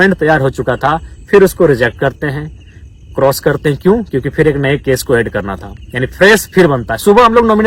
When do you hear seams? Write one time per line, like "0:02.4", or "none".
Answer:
none